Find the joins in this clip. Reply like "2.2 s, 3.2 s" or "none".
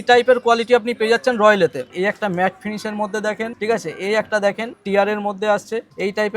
1.9 s